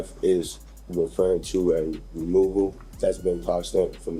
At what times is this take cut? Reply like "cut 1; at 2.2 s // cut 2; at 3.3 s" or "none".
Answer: cut 1; at 2.8 s